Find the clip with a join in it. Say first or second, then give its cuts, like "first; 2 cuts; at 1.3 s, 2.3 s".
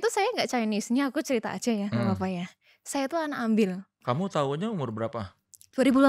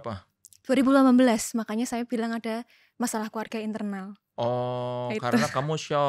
first; 1 cut; at 4.0 s